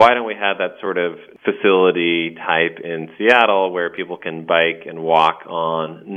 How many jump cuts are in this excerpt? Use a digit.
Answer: 1